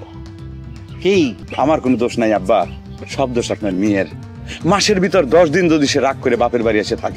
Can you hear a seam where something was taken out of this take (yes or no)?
yes